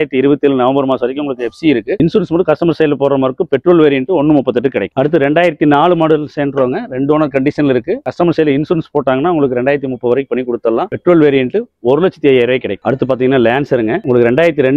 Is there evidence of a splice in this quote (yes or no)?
yes